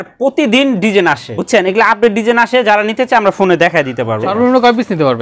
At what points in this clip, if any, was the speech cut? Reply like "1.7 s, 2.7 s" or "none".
1.3 s, 4.3 s